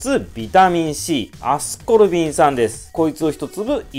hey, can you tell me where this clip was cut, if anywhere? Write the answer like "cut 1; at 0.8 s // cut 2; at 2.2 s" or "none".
cut 1; at 2.8 s